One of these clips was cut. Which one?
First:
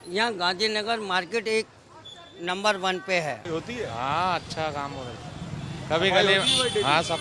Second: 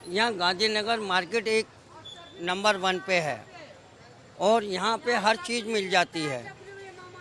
first; 1 cut; at 3.4 s

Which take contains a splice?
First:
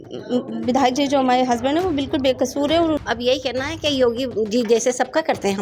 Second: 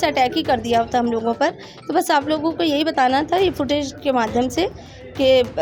first; 1 cut; at 3.0 s

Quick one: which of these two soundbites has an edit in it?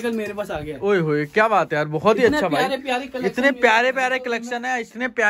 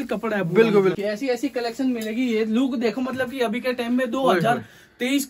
second; 1 cut; at 0.9 s

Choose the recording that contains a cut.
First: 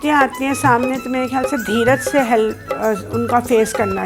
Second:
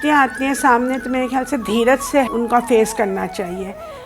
second; 1 cut; at 2.3 s

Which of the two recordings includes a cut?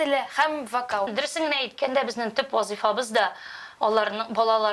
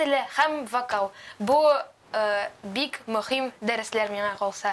first; 1 cut; at 1.1 s

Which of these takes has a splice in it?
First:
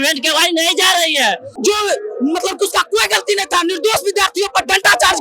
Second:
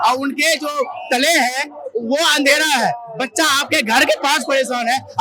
first; 1 cut; at 1.5 s

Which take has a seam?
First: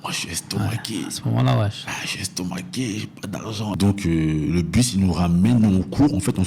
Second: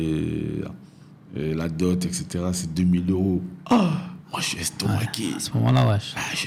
first; 1 cut; at 3.7 s

